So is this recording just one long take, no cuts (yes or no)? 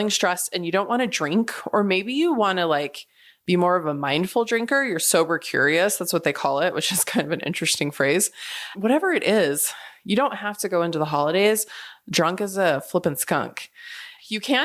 yes